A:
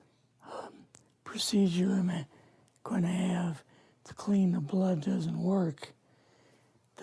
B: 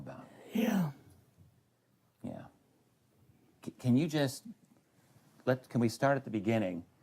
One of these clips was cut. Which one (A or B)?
B